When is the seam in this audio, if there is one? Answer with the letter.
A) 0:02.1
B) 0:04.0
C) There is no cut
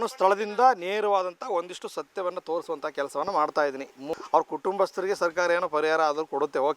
B